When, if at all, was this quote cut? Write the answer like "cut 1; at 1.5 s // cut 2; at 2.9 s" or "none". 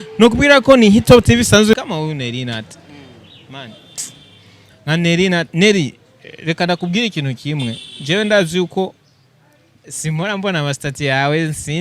cut 1; at 1.8 s